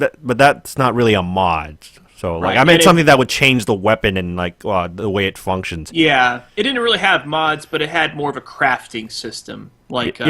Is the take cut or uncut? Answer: cut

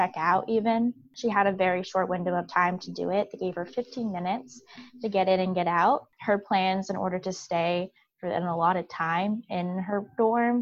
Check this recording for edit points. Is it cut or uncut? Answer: cut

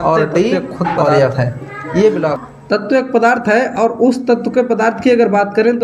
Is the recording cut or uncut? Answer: cut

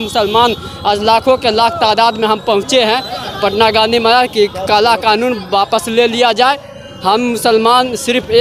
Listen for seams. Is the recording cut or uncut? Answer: uncut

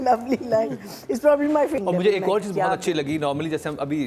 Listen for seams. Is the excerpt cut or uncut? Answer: cut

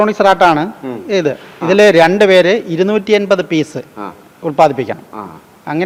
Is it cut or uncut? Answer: uncut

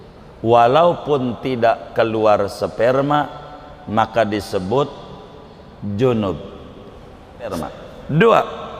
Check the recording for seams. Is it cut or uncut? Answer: cut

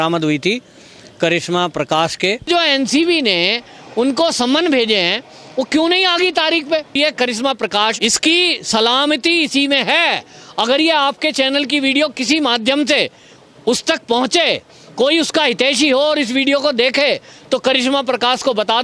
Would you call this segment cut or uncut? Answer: cut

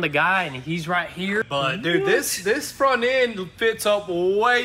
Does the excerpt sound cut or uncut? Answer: cut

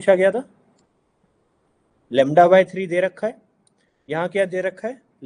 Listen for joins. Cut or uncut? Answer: cut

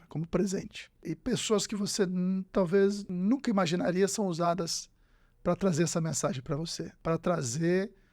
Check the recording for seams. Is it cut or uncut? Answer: cut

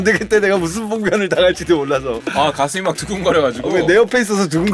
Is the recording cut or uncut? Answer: cut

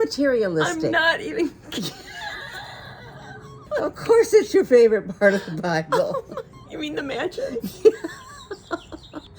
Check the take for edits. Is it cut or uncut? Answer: cut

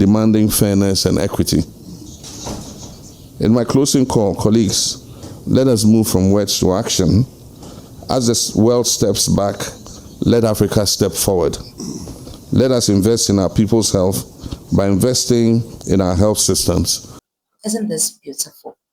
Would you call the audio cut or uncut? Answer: uncut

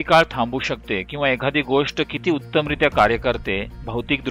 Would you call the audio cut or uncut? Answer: uncut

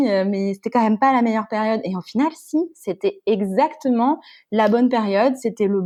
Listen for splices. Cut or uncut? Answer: uncut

